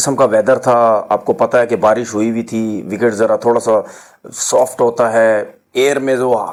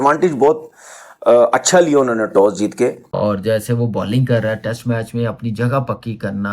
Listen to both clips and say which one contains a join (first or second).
second